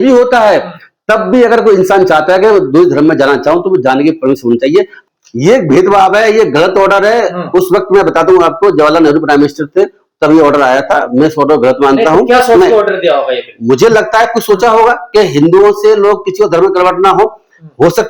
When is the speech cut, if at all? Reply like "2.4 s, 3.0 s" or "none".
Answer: 5.0 s